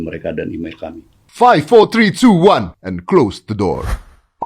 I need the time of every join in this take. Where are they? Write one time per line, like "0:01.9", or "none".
0:01.3